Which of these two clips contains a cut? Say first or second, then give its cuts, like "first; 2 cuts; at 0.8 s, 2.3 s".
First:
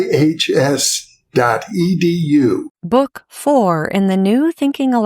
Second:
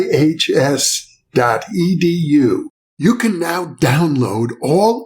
first; 1 cut; at 2.7 s